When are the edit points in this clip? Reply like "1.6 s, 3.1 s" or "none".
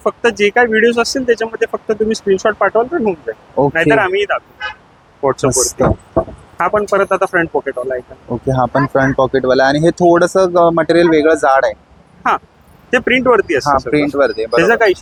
none